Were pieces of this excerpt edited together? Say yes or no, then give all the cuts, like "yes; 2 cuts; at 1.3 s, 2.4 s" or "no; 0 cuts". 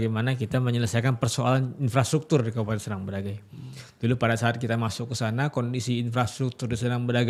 no; 0 cuts